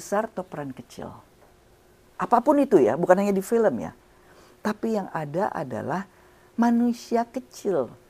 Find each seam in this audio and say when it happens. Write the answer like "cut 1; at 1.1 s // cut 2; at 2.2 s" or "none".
none